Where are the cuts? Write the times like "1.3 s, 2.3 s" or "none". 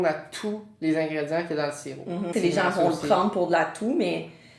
2.3 s

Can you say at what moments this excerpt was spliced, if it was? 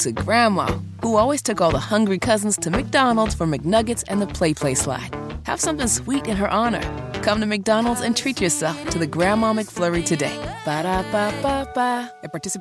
none

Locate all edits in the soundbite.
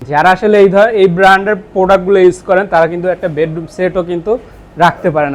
none

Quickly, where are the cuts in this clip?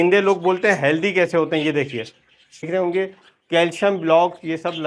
2.7 s

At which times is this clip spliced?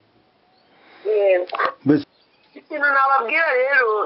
2.0 s

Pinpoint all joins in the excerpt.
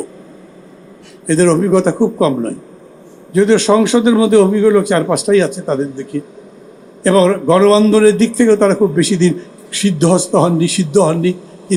none

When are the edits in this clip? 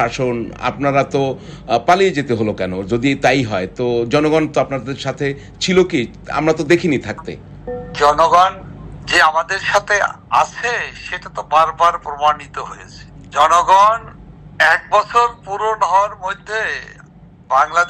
none

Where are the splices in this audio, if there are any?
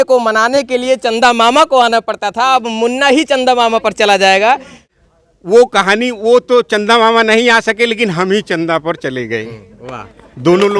4.9 s

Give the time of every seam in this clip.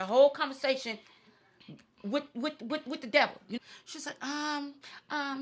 3.6 s

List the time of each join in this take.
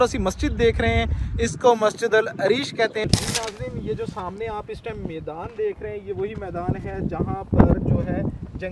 3.0 s

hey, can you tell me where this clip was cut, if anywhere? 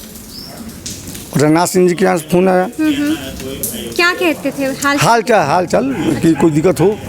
none

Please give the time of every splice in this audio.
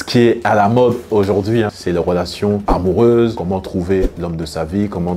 none

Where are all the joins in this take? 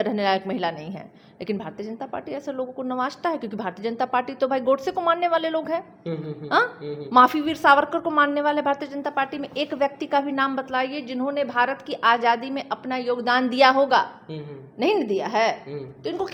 none

